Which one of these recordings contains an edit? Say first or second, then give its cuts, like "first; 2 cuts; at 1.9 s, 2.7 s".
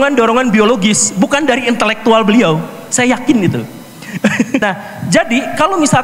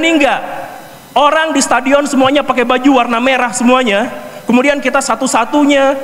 first; 1 cut; at 4.6 s